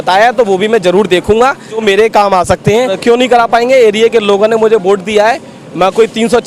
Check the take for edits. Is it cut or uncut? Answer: cut